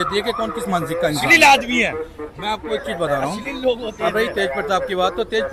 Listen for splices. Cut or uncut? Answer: uncut